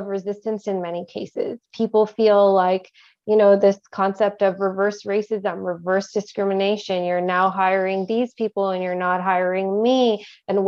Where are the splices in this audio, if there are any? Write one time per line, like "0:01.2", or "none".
none